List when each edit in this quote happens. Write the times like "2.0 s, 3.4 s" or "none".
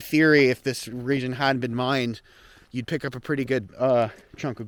none